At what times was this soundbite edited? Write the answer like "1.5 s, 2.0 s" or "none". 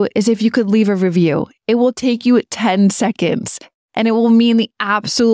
none